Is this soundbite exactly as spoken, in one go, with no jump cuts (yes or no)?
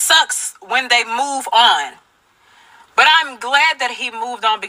yes